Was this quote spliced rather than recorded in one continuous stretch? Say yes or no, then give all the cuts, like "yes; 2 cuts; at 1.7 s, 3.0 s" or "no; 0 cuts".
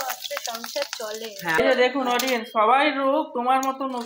yes; 1 cut; at 1.6 s